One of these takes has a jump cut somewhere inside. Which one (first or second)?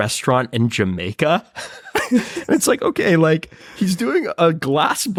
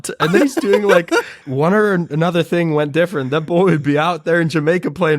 second